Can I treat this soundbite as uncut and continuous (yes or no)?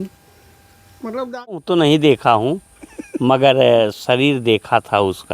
no